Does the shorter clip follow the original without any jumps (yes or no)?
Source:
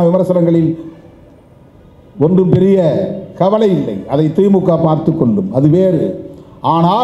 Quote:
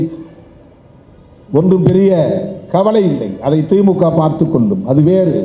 yes